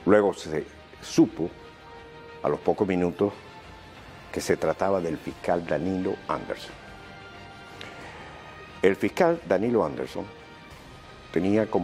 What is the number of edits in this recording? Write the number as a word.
one